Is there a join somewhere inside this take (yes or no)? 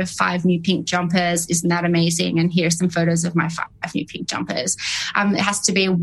no